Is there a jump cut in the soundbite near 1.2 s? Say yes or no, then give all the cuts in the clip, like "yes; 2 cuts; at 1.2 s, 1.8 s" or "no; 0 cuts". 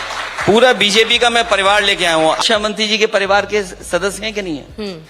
no; 1 cut; at 2.4 s